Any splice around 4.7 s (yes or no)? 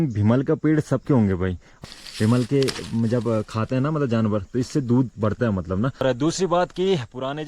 no